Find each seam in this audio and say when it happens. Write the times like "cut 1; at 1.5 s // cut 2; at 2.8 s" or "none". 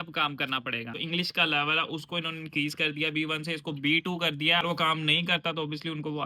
cut 1; at 1.0 s // cut 2; at 4.6 s